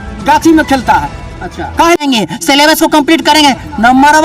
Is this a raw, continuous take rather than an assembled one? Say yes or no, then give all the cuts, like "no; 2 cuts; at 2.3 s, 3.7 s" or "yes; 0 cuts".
no; 1 cut; at 2.0 s